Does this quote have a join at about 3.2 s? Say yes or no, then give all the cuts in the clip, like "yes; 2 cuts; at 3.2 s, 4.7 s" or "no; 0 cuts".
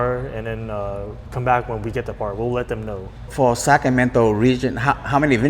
yes; 1 cut; at 3.2 s